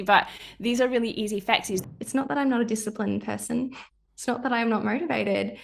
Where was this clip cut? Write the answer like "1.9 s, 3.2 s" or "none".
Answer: 1.8 s

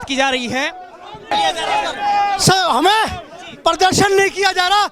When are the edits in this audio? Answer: 1.3 s

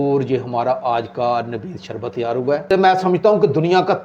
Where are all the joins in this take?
2.7 s

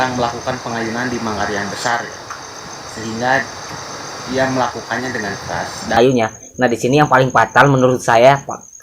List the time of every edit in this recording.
6.0 s

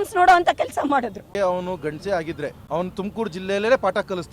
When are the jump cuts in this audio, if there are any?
1.3 s, 2.6 s

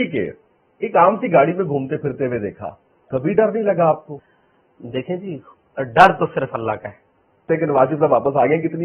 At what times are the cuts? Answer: 4.2 s, 7.4 s

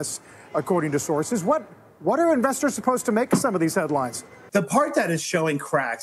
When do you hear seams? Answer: 4.3 s

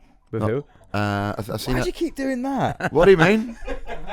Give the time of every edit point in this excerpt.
none

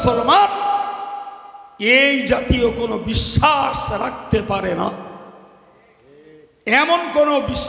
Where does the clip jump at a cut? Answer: none

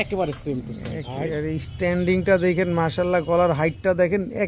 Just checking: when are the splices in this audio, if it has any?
none

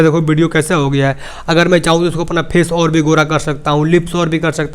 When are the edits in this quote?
none

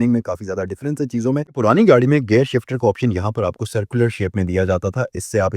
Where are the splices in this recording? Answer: 1.5 s

